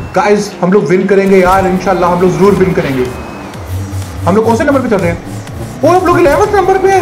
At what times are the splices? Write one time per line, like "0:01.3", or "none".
none